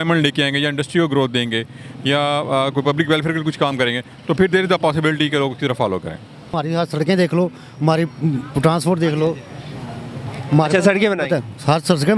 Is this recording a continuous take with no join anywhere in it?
no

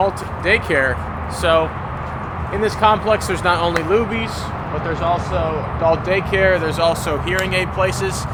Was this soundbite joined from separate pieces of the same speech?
no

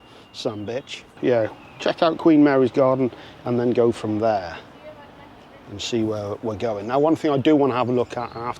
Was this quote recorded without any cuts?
yes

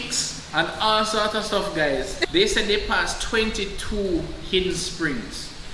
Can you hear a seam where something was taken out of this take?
yes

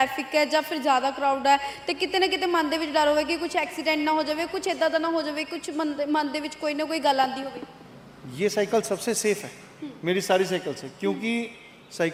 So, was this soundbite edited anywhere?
no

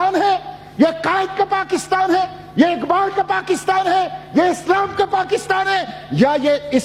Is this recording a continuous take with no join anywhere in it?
yes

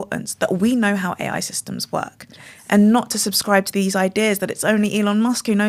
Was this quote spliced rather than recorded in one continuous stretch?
no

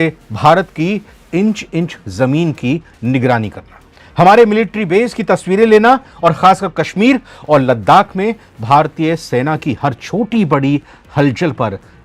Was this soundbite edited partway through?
no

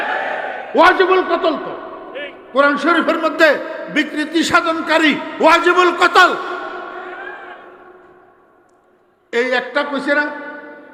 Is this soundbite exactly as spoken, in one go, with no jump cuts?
yes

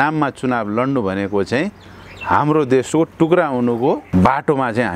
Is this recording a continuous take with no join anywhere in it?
no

